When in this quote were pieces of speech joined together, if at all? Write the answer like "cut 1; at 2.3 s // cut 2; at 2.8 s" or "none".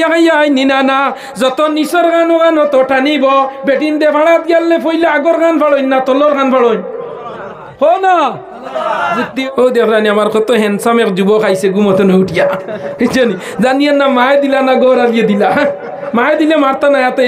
cut 1; at 9.4 s